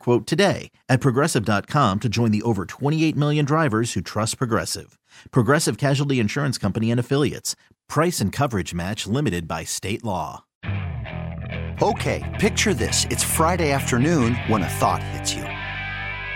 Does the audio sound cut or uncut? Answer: cut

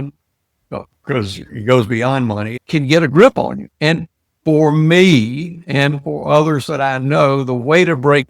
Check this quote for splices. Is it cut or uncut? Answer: cut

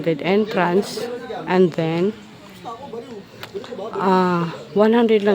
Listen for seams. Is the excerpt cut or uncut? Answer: uncut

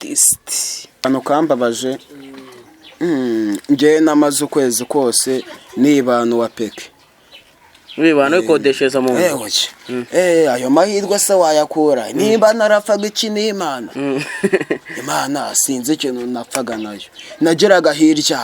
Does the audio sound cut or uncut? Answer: cut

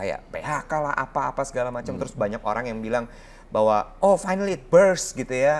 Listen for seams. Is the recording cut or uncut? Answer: uncut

